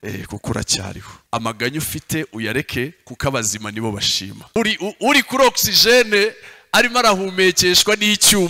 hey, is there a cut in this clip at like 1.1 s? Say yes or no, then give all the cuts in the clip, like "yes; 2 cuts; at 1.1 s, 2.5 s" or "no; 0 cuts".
yes; 2 cuts; at 1.1 s, 4.6 s